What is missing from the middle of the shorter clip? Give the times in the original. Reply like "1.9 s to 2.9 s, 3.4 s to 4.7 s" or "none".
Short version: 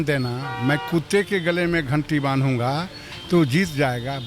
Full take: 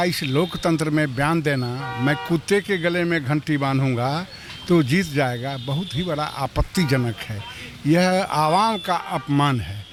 none